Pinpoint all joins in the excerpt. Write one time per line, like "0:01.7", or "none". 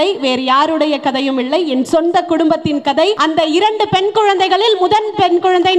0:03.2